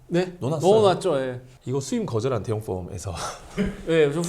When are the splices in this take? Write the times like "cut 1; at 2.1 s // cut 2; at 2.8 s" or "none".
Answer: cut 1; at 1.4 s